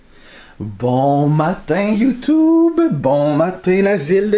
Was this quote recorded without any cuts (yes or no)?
yes